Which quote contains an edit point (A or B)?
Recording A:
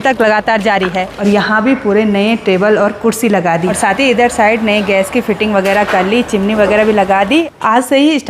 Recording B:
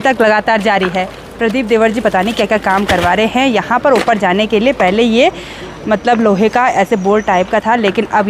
A